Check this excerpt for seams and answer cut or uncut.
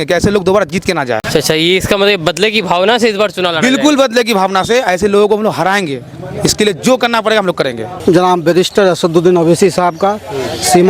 cut